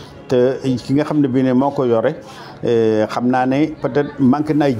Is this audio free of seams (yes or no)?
yes